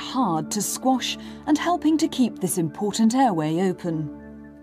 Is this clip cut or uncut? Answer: cut